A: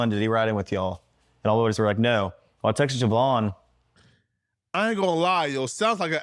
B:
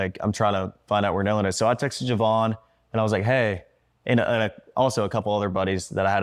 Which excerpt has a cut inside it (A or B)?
B